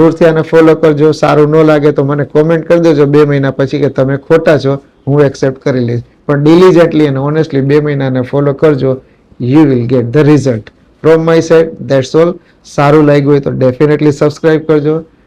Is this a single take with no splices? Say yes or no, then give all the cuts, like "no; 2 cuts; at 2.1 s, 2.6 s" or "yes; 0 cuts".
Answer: yes; 0 cuts